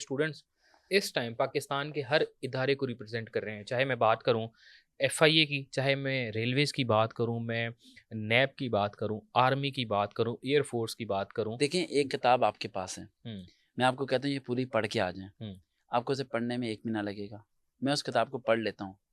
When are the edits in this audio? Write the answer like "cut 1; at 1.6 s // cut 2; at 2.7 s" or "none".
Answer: cut 1; at 11.6 s